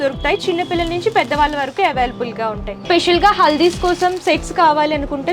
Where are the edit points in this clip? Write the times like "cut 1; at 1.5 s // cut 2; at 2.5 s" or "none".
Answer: cut 1; at 2.7 s

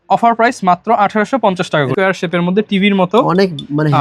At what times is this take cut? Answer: cut 1; at 1.9 s

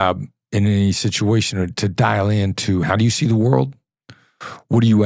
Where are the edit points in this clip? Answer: cut 1; at 2.9 s

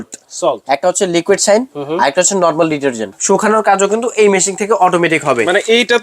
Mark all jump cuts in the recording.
cut 1; at 3.1 s

